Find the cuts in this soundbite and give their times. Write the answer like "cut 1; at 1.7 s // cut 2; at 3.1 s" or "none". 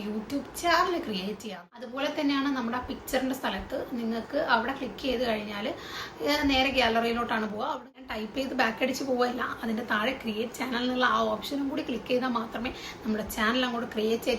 cut 1; at 1.5 s // cut 2; at 7.7 s

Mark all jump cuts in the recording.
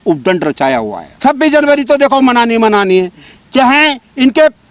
cut 1; at 1.1 s

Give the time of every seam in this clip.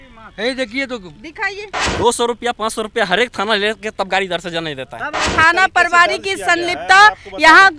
cut 1; at 1.8 s // cut 2; at 5.3 s

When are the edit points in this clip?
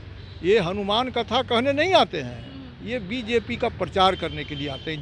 none

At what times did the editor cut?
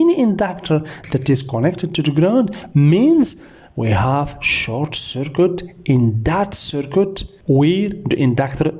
cut 1; at 7.3 s

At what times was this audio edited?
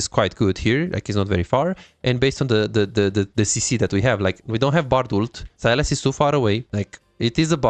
cut 1; at 5.4 s // cut 2; at 6.7 s

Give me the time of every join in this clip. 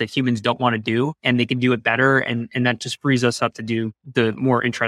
cut 1; at 1.2 s // cut 2; at 4.0 s

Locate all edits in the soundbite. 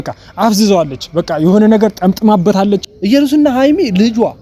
cut 1; at 2.8 s

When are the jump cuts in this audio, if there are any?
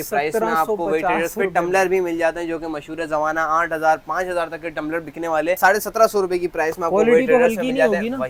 none

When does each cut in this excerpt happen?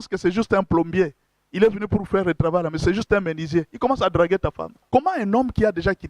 cut 1; at 4.8 s

